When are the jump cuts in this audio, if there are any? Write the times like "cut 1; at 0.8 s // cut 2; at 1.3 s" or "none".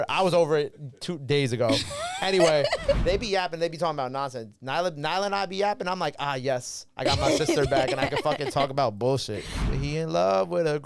cut 1; at 3.0 s // cut 2; at 9.7 s